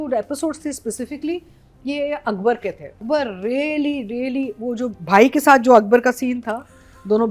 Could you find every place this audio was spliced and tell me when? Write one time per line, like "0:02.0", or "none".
0:03.0